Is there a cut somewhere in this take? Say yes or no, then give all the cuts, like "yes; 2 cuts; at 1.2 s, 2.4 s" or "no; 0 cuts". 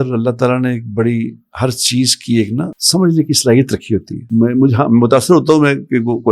yes; 2 cuts; at 2.8 s, 4.2 s